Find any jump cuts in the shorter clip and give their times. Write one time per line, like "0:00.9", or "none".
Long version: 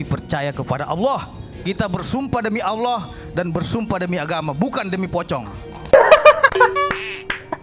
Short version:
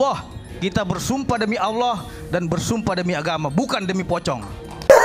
none